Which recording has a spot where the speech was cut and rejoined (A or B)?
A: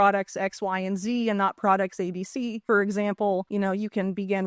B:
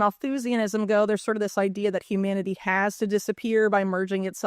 A